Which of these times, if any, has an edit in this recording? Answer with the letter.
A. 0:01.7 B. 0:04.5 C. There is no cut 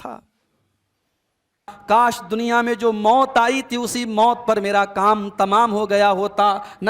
A